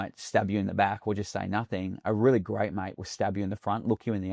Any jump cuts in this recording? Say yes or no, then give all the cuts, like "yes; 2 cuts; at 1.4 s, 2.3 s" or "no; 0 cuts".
no; 0 cuts